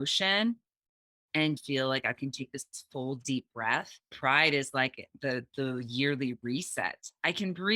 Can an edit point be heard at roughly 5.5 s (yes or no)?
no